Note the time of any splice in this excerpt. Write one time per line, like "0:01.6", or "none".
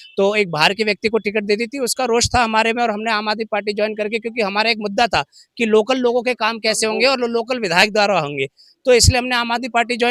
none